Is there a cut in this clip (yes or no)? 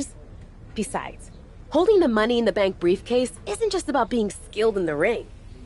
no